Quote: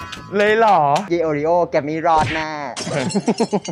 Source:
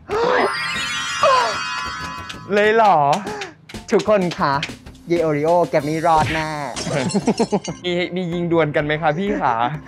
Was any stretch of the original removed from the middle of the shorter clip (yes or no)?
yes